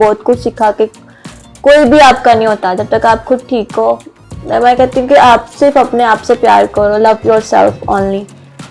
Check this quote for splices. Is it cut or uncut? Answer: uncut